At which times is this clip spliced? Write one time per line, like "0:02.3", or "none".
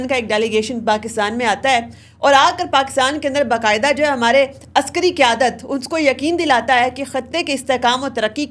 none